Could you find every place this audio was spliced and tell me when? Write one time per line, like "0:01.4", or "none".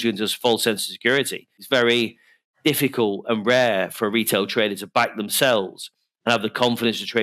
0:01.6